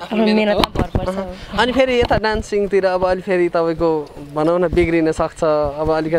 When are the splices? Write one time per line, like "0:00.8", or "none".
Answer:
none